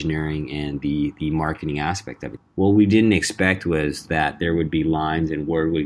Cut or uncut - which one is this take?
cut